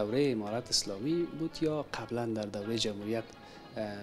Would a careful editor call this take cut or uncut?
uncut